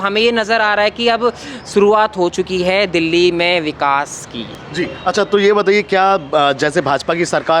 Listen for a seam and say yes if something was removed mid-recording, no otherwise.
no